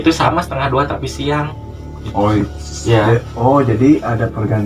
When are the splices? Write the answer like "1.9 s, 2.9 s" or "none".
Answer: none